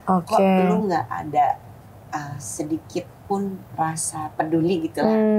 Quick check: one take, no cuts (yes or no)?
no